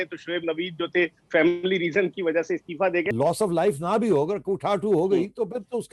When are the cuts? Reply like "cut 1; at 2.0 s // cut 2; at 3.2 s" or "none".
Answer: cut 1; at 3.1 s